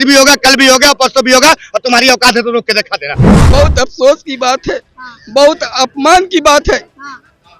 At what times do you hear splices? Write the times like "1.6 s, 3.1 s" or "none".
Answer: 3.3 s